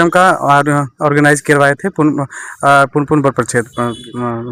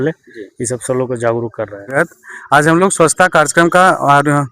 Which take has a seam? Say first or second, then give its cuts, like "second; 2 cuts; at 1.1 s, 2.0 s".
second; 1 cut; at 1.9 s